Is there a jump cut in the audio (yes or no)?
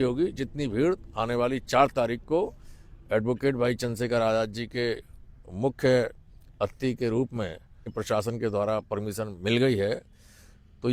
yes